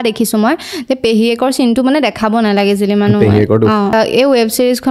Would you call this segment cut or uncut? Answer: cut